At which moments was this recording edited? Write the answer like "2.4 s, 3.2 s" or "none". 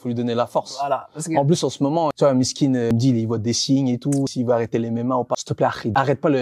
2.1 s, 2.9 s, 4.3 s, 5.5 s